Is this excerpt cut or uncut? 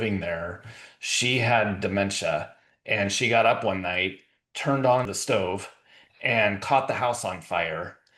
cut